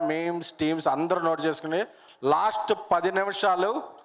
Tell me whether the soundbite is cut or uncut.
uncut